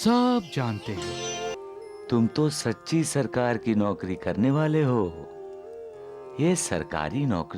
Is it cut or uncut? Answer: cut